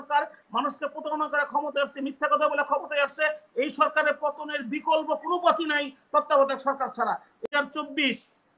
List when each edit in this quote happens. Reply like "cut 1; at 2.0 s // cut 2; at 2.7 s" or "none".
cut 1; at 7.4 s